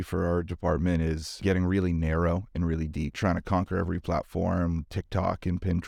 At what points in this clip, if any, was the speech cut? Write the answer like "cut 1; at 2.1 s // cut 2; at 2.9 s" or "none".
cut 1; at 1.3 s // cut 2; at 3.1 s // cut 3; at 4.9 s